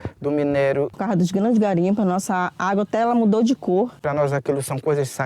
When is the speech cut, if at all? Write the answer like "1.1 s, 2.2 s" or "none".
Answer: 1.0 s, 4.0 s